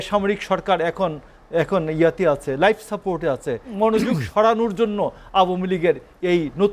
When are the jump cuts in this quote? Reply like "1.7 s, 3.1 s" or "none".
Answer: 3.7 s